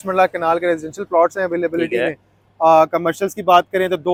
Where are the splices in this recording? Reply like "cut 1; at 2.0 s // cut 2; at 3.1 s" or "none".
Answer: none